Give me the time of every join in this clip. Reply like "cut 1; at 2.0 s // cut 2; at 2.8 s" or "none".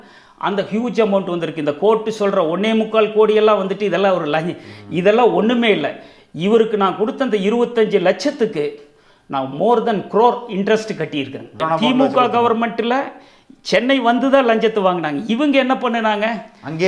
cut 1; at 11.6 s

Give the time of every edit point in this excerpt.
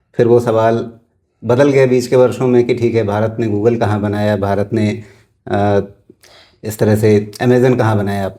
none

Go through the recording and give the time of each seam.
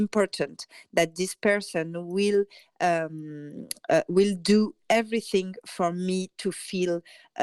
none

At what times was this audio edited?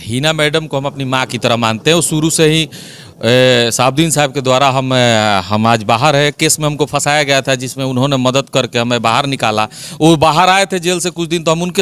none

